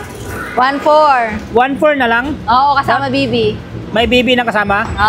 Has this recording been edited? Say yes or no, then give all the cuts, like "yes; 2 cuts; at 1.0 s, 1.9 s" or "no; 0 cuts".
no; 0 cuts